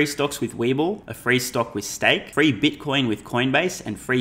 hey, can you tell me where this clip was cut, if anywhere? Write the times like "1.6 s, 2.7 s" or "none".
1.1 s, 2.3 s